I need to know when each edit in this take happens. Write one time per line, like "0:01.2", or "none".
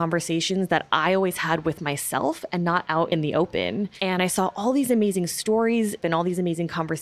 0:06.0